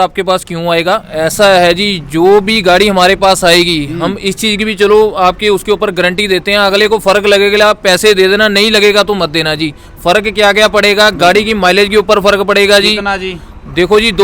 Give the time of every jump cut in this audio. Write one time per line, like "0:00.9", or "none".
0:01.1